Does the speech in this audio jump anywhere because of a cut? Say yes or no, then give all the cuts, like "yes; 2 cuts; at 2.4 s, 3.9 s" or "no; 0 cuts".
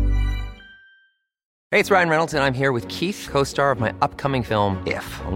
yes; 1 cut; at 1.5 s